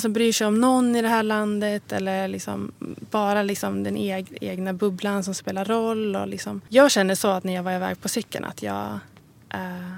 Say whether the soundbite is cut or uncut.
cut